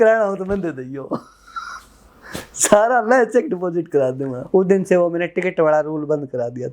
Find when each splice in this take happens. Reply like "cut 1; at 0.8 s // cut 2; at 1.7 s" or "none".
cut 1; at 4.4 s